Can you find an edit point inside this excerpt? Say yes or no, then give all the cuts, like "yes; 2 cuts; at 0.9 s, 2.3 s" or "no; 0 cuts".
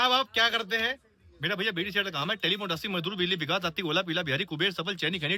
no; 0 cuts